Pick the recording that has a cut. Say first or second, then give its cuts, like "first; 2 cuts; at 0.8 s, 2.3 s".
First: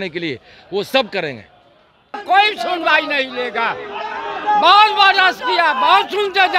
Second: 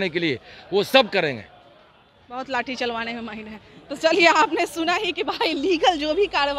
first; 1 cut; at 2.2 s